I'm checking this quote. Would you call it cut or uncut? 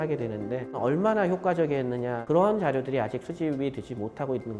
cut